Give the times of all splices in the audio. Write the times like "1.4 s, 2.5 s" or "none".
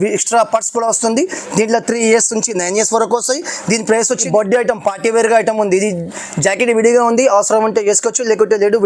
4.2 s

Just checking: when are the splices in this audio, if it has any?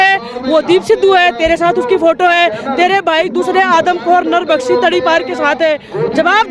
none

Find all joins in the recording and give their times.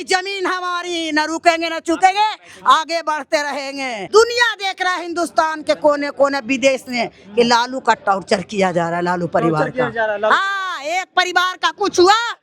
4.0 s

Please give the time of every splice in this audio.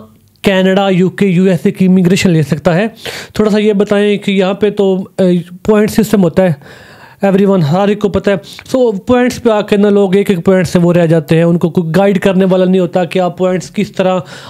none

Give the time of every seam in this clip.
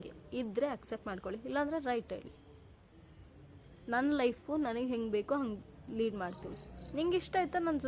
none

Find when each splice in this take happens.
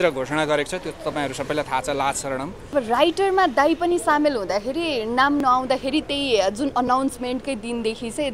2.7 s

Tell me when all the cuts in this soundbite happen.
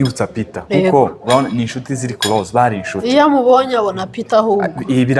none

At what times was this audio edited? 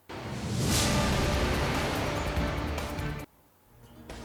none

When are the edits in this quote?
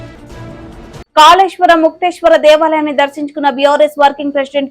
1.0 s

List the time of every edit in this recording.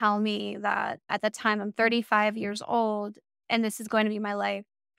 1.1 s

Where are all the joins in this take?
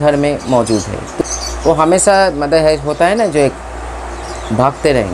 1.0 s

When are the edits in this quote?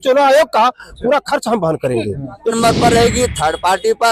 2.5 s

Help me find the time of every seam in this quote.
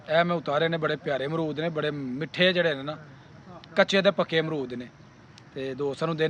none

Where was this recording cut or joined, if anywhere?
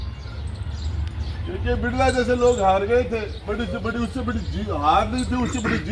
none

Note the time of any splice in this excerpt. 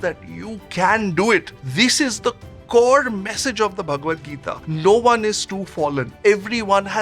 none

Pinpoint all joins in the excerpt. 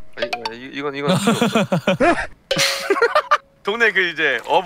3.6 s

